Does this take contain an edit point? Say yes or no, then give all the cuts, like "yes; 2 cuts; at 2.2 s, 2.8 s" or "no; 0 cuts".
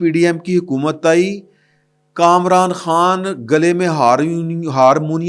no; 0 cuts